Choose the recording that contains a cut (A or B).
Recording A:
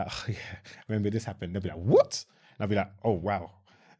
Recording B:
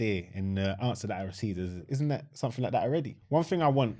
B